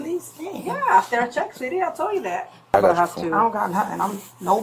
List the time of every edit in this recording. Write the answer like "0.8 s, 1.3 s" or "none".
2.7 s

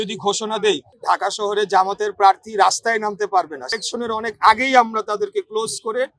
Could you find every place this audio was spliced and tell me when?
0.9 s, 3.7 s

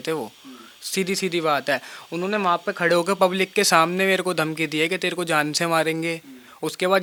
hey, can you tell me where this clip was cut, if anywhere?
none

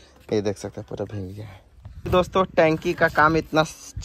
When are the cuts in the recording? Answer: 1.9 s

